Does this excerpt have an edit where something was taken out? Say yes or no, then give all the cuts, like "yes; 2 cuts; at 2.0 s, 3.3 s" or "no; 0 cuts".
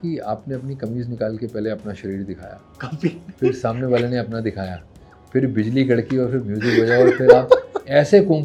no; 0 cuts